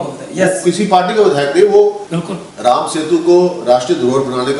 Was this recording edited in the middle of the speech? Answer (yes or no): yes